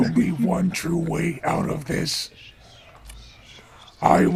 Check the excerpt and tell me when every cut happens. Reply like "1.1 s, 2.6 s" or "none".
none